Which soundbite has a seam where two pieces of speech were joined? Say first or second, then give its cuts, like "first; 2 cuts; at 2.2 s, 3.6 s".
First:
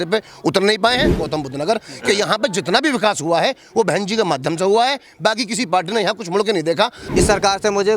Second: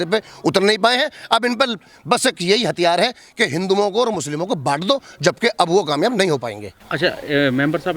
first; 2 cuts; at 1.2 s, 7.0 s